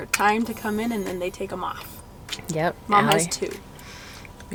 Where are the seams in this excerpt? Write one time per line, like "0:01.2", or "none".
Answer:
none